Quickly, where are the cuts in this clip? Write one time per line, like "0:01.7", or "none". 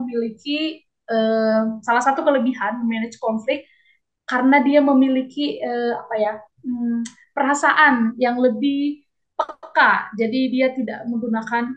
none